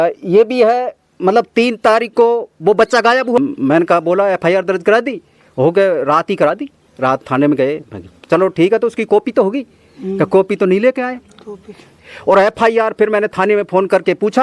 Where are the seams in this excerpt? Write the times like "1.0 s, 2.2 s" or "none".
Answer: 3.4 s, 11.9 s